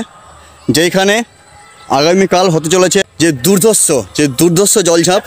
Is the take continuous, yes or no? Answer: no